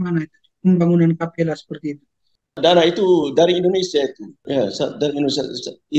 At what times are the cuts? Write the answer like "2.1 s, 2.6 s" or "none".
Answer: 2.6 s, 4.3 s